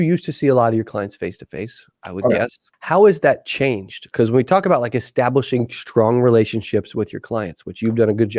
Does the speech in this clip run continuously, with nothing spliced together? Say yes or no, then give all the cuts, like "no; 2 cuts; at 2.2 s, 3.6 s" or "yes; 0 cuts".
no; 1 cut; at 2.7 s